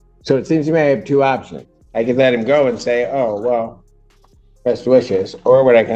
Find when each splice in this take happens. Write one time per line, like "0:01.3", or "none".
none